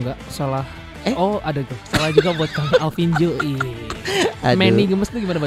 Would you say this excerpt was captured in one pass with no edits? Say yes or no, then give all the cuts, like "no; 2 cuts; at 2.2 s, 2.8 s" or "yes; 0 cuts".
yes; 0 cuts